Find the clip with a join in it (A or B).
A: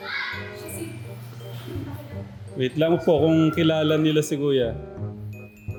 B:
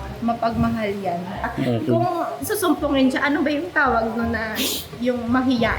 B